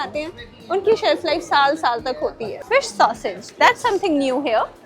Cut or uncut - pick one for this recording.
cut